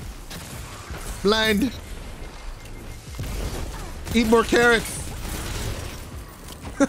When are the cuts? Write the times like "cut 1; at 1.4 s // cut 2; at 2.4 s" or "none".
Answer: none